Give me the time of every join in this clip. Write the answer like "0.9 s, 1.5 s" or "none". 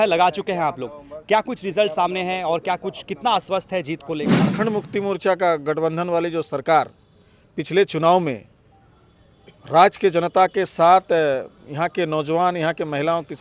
4.3 s